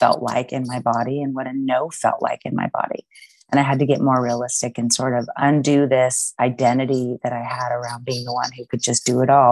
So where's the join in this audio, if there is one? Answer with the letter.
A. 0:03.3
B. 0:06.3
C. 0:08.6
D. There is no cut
D